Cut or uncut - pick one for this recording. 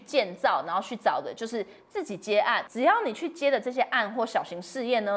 cut